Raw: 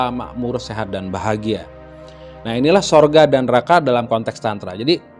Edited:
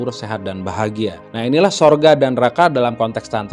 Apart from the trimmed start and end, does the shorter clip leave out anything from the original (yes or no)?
yes